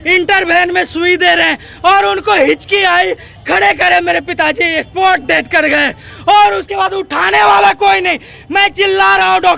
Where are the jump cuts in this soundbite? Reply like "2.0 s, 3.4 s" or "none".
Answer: none